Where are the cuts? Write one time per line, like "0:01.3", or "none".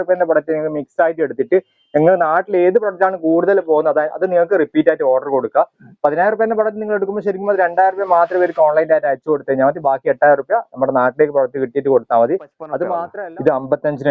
0:12.7